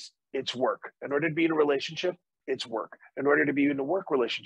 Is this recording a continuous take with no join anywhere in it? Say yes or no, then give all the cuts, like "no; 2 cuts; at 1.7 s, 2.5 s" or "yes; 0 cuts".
yes; 0 cuts